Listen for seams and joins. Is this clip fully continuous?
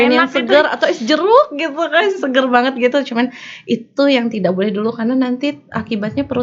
yes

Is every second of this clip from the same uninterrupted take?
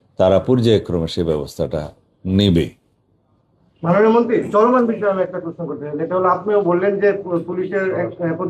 yes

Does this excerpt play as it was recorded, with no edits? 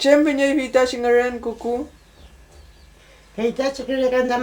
no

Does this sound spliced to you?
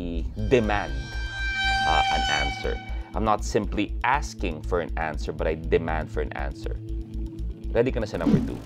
no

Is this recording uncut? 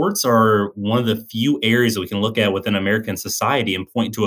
yes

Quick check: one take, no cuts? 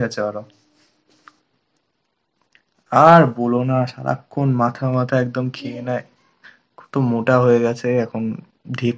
yes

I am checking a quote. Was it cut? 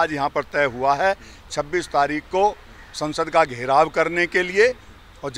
no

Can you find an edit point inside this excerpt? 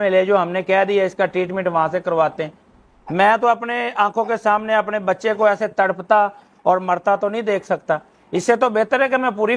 no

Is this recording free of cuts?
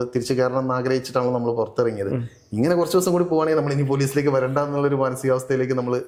yes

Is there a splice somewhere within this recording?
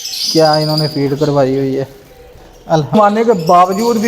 yes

